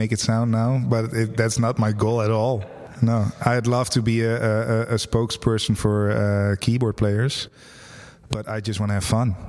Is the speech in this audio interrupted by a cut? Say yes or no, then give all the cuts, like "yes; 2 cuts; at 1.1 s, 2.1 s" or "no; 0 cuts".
yes; 1 cut; at 2.9 s